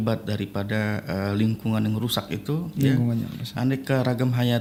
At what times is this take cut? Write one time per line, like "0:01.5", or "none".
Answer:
none

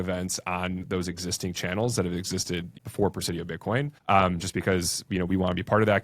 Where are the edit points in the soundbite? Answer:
0:02.7
0:03.9

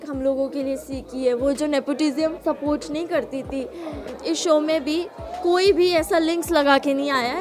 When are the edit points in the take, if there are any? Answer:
0:02.4
0:04.1

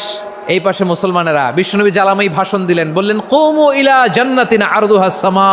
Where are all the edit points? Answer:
none

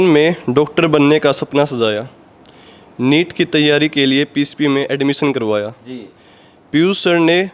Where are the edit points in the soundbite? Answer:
none

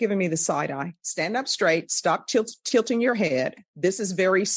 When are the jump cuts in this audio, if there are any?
0:01.0
0:03.6

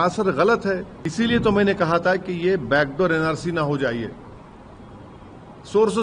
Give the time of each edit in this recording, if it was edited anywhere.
0:01.0

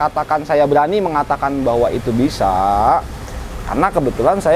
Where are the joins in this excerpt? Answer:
none

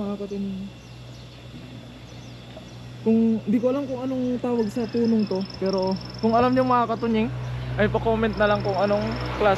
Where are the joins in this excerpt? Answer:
none

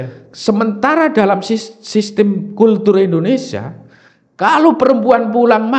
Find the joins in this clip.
none

